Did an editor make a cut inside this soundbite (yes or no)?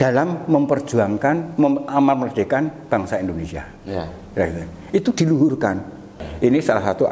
yes